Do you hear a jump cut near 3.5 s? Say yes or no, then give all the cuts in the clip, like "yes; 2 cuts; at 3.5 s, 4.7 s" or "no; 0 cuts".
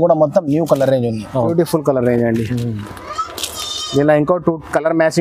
no; 1 cut; at 1.5 s